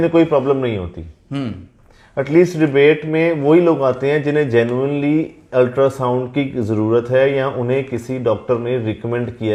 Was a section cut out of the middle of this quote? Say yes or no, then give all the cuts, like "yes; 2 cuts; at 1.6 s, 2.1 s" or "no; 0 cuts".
no; 0 cuts